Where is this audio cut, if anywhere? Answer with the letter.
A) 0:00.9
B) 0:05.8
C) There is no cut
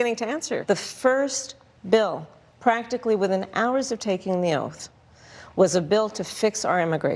A